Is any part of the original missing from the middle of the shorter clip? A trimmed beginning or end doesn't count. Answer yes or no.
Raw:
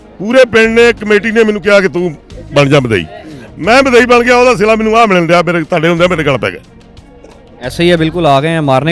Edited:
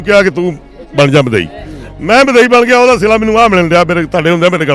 no